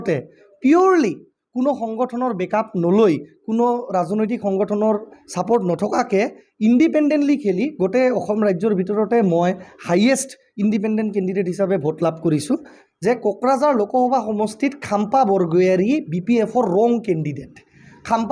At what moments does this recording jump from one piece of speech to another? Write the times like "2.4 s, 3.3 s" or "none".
12.8 s